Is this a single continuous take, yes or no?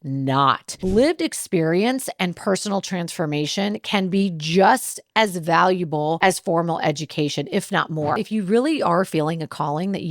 no